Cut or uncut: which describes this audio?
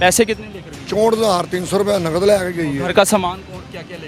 uncut